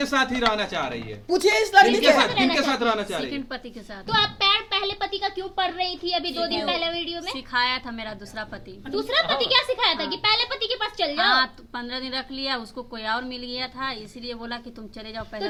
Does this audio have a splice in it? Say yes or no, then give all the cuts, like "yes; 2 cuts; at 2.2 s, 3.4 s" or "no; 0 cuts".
no; 0 cuts